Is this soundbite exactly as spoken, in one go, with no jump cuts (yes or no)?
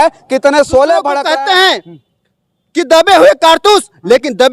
no